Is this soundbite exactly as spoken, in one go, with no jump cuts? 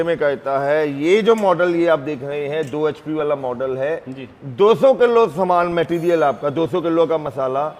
yes; 0 cuts

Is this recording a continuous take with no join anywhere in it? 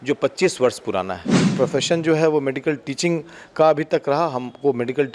no; 1 cut; at 1.4 s

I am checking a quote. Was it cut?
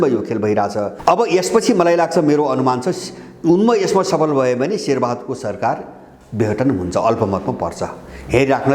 yes; 1 cut; at 0.9 s

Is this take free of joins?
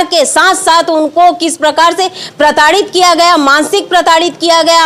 yes; 0 cuts

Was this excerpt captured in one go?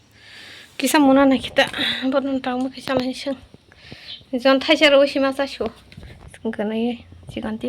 yes; 0 cuts

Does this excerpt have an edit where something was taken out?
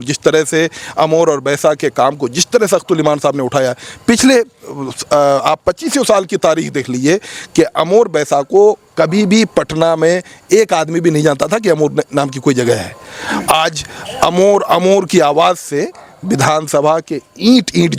no; 0 cuts

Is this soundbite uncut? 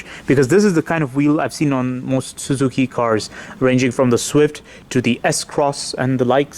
yes; 0 cuts

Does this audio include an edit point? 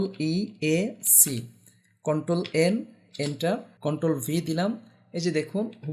yes; 1 cut; at 3.7 s

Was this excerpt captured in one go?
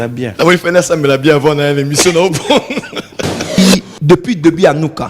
no; 1 cut; at 3.6 s

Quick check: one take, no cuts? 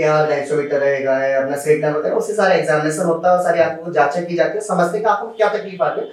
yes; 0 cuts

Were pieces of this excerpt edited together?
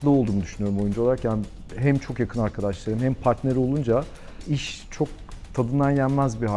no; 0 cuts

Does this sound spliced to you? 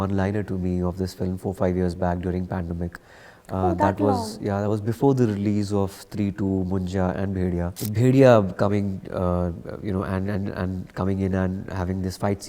yes; 1 cut; at 7.8 s

